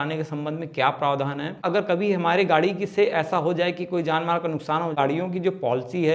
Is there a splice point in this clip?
yes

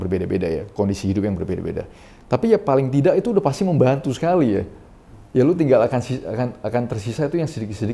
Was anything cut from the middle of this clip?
no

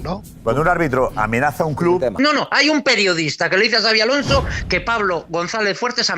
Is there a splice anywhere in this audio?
yes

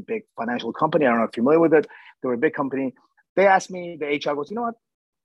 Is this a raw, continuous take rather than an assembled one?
yes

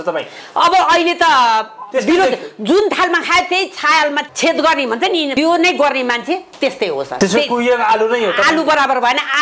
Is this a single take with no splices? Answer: no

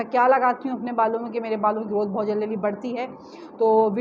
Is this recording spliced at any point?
no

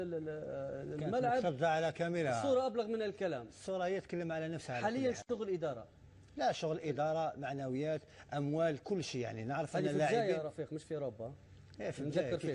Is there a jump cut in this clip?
no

